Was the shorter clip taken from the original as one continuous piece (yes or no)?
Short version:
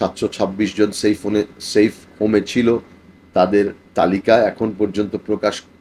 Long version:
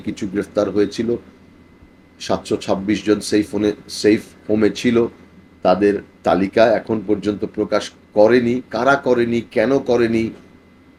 yes